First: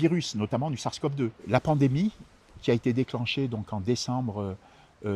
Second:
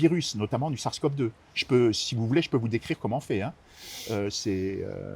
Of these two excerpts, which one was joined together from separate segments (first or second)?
first